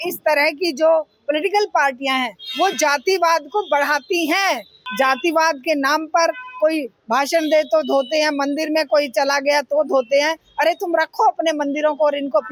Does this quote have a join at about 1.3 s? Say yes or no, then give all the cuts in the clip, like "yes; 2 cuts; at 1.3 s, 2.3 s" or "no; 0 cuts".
no; 1 cut; at 4.8 s